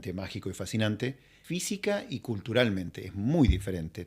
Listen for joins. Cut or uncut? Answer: cut